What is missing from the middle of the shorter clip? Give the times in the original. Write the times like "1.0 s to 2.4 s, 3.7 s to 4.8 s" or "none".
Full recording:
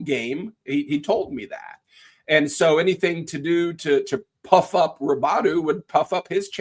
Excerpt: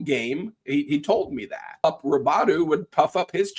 1.8 s to 4.8 s